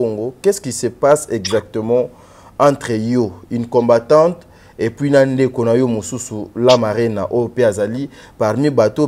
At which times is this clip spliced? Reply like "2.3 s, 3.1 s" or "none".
none